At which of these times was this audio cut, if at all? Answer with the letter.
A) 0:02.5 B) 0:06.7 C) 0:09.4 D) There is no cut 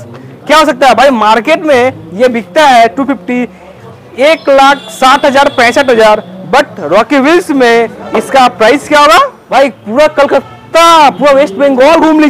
C